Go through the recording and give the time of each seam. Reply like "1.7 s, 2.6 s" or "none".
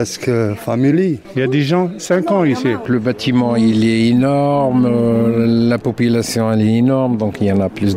2.8 s